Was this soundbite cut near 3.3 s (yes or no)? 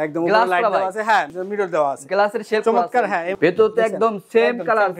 yes